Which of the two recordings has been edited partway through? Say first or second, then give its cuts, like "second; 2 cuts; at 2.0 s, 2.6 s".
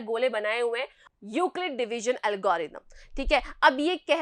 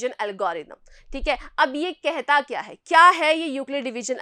first; 1 cut; at 1.0 s